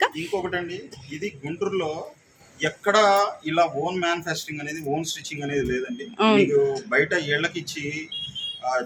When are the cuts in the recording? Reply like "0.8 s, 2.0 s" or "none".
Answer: none

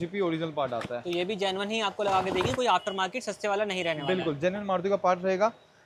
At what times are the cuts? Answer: none

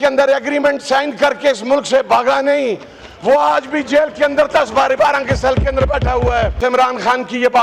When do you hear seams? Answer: 6.6 s

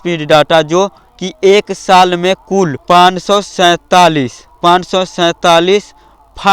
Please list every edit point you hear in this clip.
2.8 s

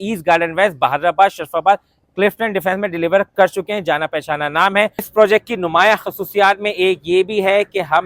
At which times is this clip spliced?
5.1 s

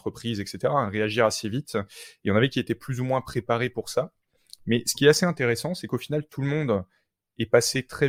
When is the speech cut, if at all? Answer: none

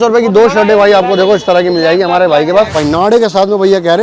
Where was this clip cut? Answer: 2.7 s

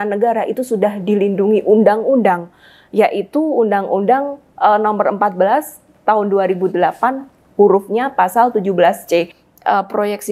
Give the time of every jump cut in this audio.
9.4 s

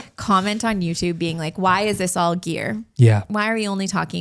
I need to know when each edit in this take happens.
3.3 s

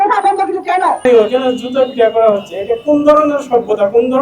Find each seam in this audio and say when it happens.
1.0 s

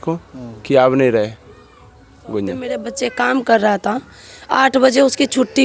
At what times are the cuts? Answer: 2.9 s

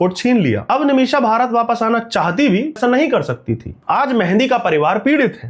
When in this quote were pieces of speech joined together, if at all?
2.8 s, 3.7 s

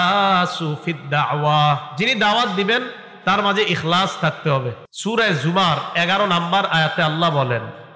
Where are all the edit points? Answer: 4.8 s

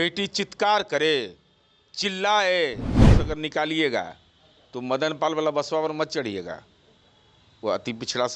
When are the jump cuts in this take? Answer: 3.1 s

